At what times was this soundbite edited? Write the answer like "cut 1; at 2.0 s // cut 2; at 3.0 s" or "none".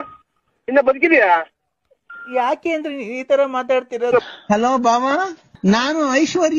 none